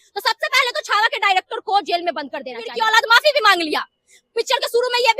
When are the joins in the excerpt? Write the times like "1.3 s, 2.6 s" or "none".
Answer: 2.7 s